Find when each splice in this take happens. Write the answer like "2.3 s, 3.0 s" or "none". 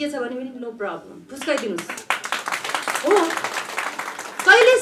none